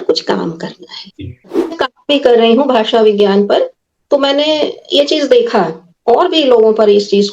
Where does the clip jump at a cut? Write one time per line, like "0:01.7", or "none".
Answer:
0:01.6